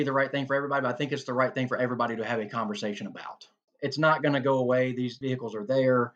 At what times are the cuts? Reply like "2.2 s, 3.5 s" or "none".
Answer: 3.6 s, 5.2 s